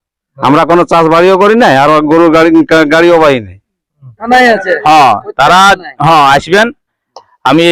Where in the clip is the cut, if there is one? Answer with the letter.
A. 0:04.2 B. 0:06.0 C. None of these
A